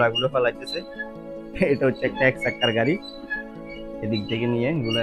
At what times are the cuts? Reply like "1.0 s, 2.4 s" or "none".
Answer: none